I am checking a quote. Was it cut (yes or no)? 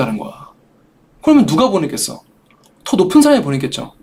no